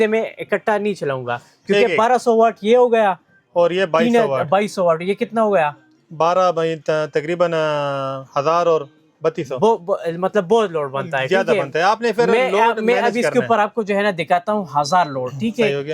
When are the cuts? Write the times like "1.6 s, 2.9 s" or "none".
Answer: none

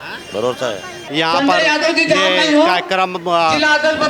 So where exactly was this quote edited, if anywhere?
1.0 s

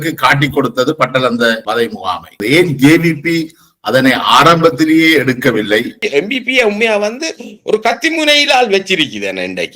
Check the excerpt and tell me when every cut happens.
2.3 s, 5.9 s

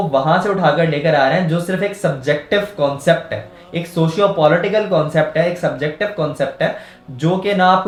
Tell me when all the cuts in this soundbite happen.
none

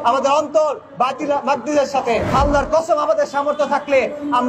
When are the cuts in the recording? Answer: 2.3 s

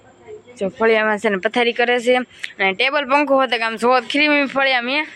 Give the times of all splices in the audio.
none

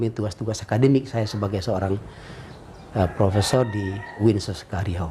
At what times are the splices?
4.1 s

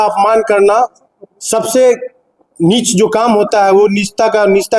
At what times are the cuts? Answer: none

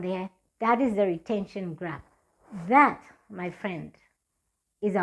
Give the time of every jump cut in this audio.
none

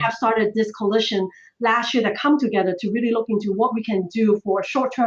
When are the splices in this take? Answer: none

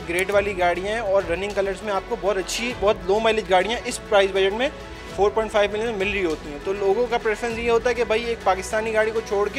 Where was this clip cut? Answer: none

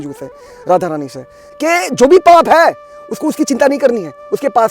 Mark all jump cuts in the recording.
1.4 s

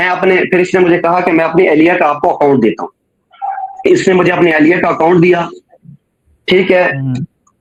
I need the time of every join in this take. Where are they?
none

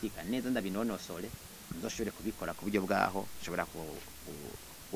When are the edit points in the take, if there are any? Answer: none

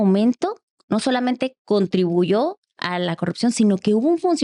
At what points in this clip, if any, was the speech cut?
none

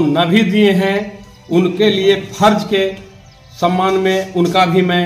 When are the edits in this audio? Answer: none

